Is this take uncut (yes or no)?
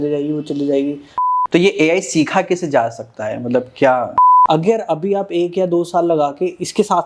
no